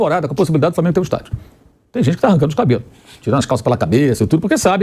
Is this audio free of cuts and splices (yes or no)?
yes